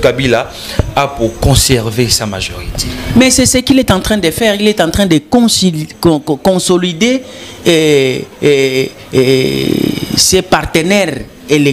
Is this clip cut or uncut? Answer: uncut